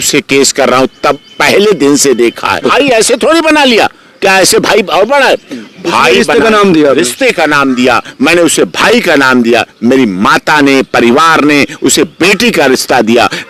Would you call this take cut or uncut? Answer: cut